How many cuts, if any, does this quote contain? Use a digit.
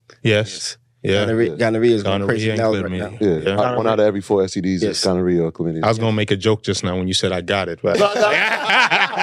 0